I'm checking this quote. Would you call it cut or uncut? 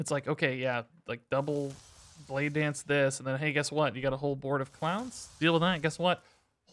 uncut